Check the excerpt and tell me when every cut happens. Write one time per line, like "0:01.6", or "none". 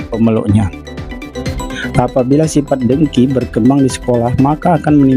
0:01.3